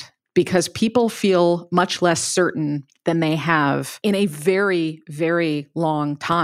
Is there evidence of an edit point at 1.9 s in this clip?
no; 1 cut; at 3.9 s

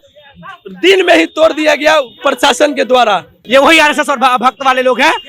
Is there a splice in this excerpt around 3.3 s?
yes; 1 cut; at 3.3 s

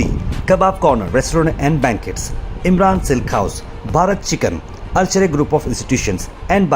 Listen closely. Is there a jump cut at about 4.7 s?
no; 0 cuts

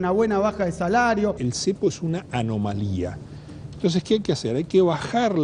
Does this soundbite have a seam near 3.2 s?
no; 1 cut; at 1.4 s

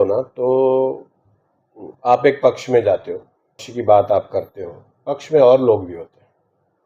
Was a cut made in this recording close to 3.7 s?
yes; 1 cut; at 3.7 s

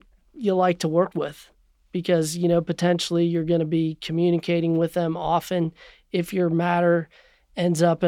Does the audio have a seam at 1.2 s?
no; 0 cuts

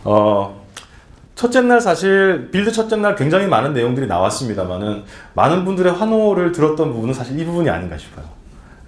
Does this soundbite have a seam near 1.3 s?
no; 1 cut; at 5.3 s

